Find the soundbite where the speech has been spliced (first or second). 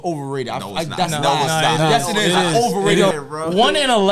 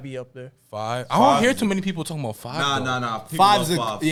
first